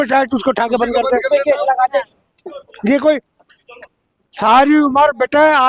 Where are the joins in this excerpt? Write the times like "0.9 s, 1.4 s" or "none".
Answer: none